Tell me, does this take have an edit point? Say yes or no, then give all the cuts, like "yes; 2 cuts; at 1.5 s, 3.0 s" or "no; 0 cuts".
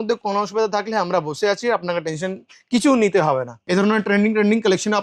yes; 1 cut; at 3.6 s